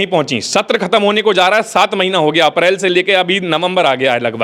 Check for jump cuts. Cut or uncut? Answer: uncut